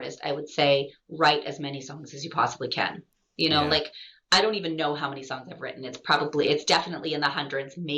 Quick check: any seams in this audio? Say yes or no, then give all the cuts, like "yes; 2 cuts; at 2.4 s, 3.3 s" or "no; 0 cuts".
no; 0 cuts